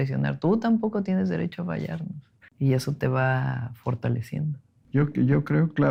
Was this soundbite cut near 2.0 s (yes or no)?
no